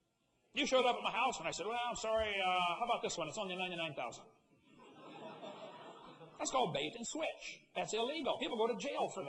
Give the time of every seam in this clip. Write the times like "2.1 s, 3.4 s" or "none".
2.4 s